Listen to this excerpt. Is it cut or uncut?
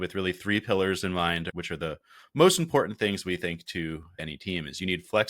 cut